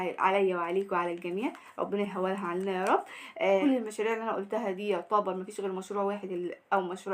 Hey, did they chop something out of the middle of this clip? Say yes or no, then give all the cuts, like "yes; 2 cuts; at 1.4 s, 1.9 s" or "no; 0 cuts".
yes; 1 cut; at 3.6 s